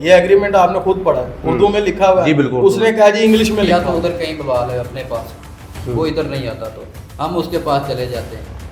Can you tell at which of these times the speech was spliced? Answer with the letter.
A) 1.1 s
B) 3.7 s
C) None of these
B